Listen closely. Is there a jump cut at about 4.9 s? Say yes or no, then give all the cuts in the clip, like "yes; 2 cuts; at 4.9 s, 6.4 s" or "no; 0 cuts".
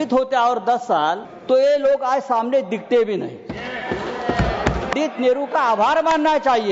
yes; 2 cuts; at 1.3 s, 4.9 s